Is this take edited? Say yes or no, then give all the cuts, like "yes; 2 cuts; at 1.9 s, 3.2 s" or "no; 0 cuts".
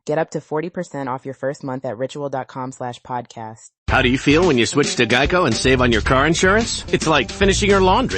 yes; 1 cut; at 3.7 s